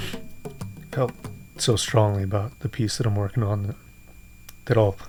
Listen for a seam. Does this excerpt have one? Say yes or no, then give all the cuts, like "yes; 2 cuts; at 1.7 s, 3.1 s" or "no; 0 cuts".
no; 0 cuts